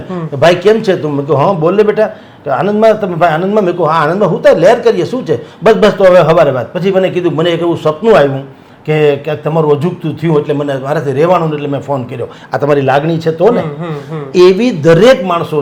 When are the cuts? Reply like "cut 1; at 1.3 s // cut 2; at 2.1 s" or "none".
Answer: none